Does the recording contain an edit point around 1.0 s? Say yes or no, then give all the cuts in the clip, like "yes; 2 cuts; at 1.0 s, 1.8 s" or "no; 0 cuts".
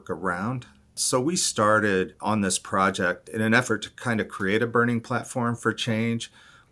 yes; 3 cuts; at 1.0 s, 2.2 s, 3.2 s